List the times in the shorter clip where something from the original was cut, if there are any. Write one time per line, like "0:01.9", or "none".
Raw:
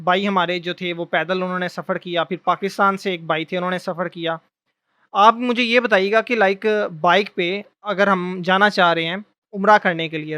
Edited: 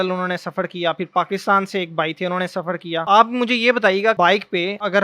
0:03.0
0:04.2